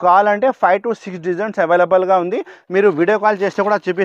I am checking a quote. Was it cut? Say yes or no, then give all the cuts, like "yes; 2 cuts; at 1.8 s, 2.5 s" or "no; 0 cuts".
no; 0 cuts